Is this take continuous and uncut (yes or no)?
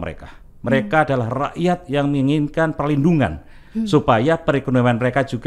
yes